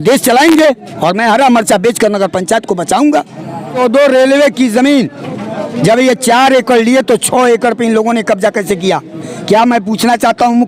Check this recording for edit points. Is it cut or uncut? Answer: cut